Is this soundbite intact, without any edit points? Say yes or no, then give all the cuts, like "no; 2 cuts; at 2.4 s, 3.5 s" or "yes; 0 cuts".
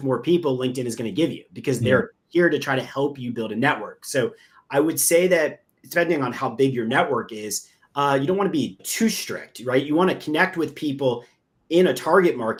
yes; 0 cuts